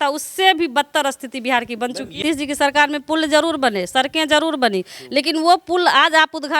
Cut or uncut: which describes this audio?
cut